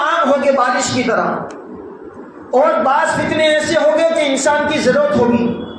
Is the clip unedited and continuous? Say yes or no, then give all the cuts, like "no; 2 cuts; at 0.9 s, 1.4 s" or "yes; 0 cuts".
yes; 0 cuts